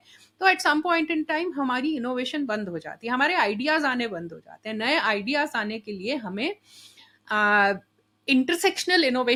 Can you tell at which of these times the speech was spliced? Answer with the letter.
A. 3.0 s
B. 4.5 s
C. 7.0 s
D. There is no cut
D